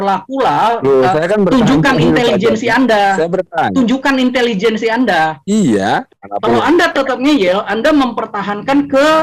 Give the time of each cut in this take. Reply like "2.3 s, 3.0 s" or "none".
6.2 s